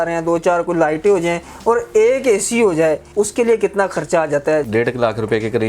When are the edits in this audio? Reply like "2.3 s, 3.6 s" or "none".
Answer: 3.0 s, 4.7 s